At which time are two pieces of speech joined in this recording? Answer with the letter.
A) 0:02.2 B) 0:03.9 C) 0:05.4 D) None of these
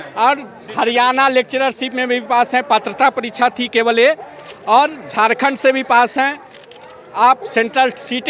D